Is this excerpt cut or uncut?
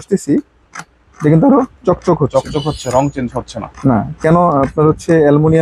uncut